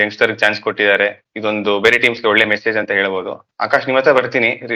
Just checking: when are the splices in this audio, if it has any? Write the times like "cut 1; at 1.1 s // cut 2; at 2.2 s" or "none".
none